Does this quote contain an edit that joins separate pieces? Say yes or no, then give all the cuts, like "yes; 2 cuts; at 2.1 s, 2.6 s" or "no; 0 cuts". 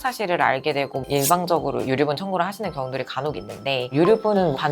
yes; 2 cuts; at 1.0 s, 3.9 s